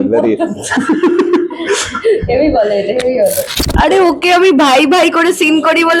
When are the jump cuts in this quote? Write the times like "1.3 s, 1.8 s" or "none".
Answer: 3.5 s